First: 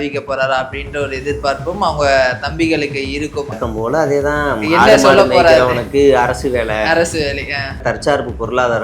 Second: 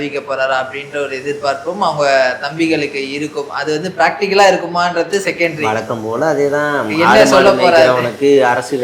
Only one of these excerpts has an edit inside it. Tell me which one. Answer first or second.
first